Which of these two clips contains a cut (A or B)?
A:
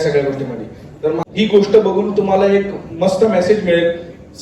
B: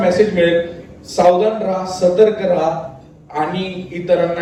A